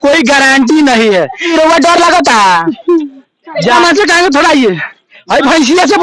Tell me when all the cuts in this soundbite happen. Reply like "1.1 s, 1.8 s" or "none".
1.5 s, 3.8 s

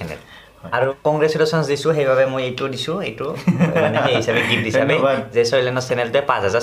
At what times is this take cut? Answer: 0.9 s

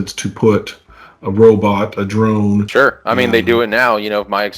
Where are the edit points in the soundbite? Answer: 2.7 s

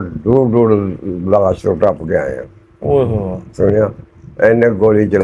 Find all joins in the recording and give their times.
none

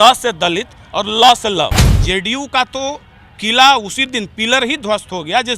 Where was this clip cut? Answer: 1.9 s

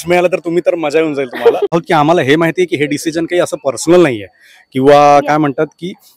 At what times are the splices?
1.8 s

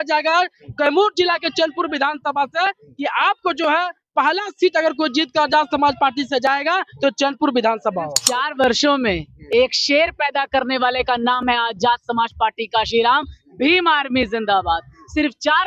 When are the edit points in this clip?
8.2 s

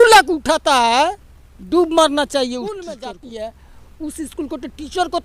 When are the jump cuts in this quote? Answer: 3.0 s

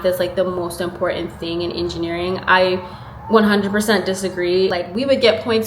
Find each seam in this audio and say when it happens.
4.7 s

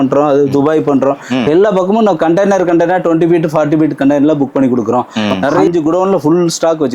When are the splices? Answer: 5.6 s

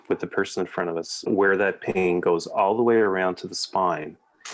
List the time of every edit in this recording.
1.2 s

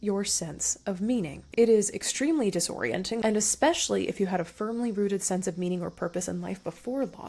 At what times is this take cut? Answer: 1.4 s, 3.2 s

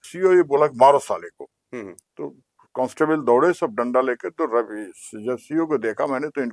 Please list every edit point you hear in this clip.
none

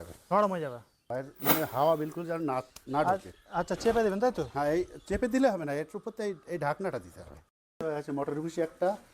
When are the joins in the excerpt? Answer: 1.0 s, 7.5 s

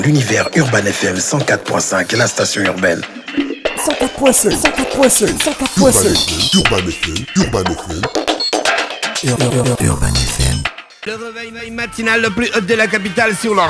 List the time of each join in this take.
11.1 s

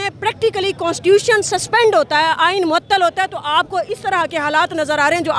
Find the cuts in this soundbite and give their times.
none

